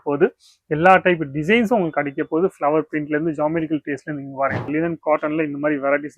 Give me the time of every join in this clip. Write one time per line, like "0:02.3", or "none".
0:04.6